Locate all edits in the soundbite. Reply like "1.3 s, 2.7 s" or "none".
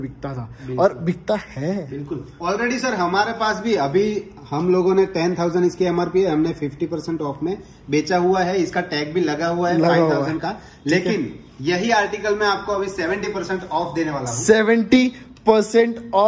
none